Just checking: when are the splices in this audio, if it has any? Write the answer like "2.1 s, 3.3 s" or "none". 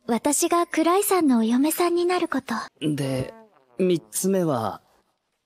2.7 s